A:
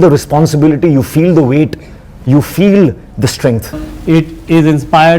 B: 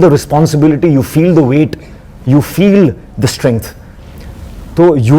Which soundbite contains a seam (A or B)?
A